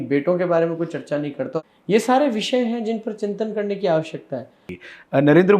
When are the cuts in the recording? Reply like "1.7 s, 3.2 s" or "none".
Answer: 1.6 s, 4.7 s